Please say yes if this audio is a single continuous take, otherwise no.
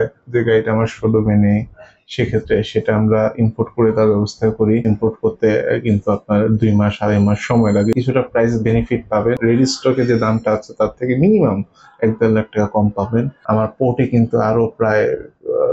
no